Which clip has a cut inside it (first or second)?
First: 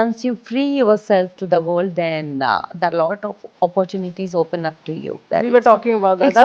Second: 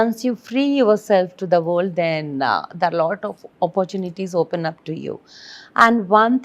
first